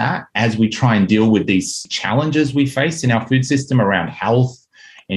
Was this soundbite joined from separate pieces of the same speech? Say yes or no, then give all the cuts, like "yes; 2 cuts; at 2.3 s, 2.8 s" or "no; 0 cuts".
yes; 1 cut; at 1.9 s